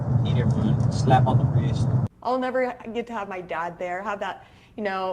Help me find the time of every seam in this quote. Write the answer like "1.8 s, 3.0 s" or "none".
2.1 s